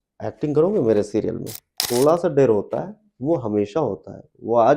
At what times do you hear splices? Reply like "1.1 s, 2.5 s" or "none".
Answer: 1.8 s